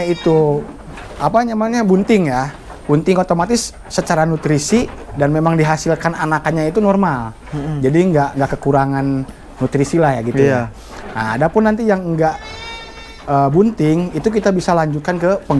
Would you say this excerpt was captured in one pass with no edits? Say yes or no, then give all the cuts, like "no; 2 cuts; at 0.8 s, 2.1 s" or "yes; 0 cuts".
yes; 0 cuts